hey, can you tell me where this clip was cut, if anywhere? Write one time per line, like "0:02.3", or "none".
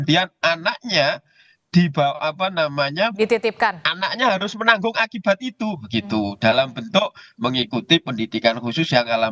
none